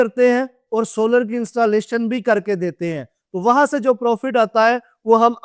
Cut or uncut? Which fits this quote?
uncut